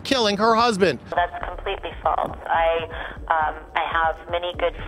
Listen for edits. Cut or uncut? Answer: cut